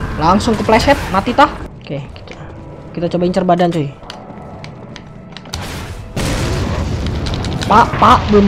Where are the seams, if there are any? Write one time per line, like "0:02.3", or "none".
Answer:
0:01.7